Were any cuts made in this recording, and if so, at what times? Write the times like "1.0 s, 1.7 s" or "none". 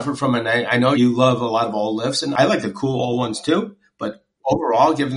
0.9 s, 2.3 s